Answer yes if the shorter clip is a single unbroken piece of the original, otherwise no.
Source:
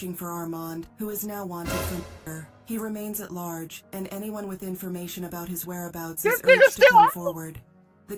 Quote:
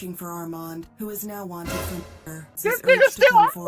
no